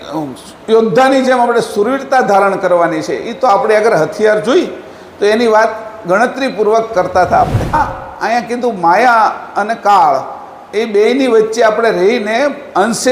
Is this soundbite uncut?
no; 1 cut; at 7.8 s

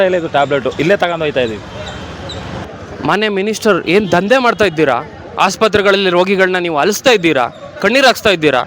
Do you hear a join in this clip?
yes; 1 cut; at 2.7 s

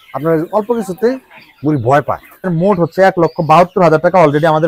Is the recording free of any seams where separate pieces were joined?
no; 1 cut; at 2.5 s

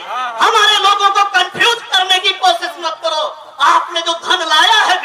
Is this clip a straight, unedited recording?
yes; 0 cuts

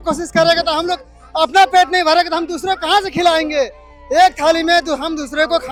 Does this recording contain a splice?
no; 0 cuts

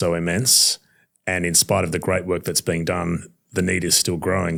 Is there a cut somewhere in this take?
no; 0 cuts

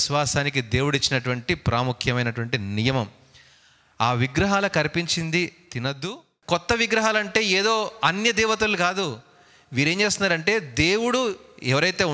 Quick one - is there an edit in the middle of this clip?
yes; 1 cut; at 6.1 s

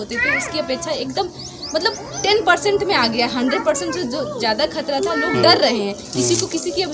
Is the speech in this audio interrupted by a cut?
no; 0 cuts

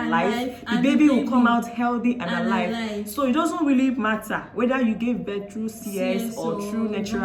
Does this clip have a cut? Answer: no; 0 cuts

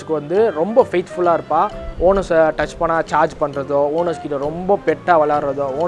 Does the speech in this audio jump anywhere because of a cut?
no; 0 cuts

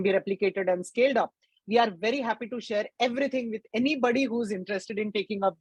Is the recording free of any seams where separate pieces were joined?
yes; 0 cuts

